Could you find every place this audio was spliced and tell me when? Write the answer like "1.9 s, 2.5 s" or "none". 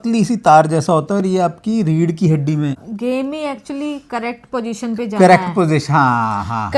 2.8 s

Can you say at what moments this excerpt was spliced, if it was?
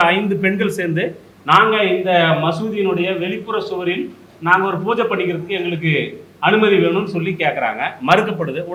none

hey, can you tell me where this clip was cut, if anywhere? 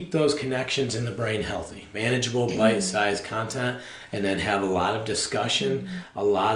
1.8 s

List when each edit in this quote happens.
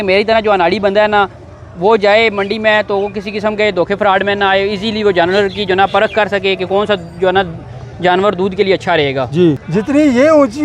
9.6 s

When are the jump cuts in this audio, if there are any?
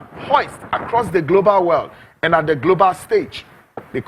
none

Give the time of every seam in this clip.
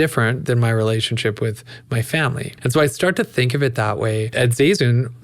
2.5 s, 4.3 s

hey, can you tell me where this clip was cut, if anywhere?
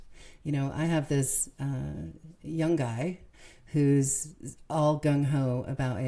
none

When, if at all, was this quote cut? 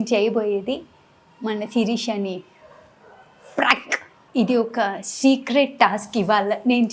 4.2 s

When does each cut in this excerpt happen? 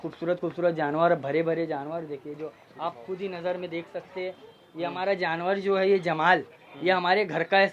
none

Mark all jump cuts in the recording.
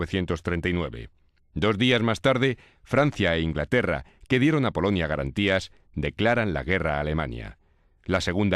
6.1 s

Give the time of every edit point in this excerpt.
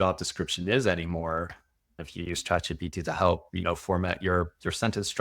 2.0 s

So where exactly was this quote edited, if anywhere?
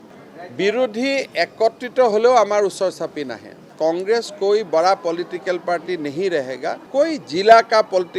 3.6 s, 6.8 s

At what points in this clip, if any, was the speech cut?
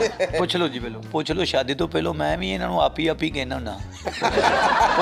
1.1 s

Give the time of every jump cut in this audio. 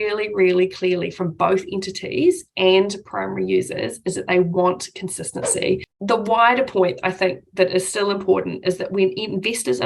5.9 s

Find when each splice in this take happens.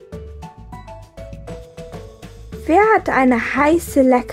1.0 s, 2.6 s

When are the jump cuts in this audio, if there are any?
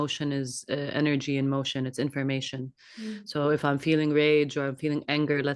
none

